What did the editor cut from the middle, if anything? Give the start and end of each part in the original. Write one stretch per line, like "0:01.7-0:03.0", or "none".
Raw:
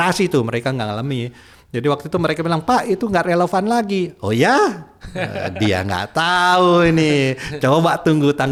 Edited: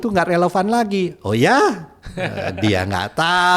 none